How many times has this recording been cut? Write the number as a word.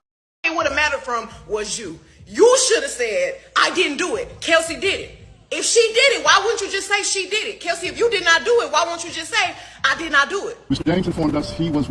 one